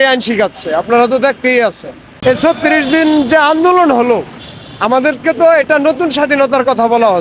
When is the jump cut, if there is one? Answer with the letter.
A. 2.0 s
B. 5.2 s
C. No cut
A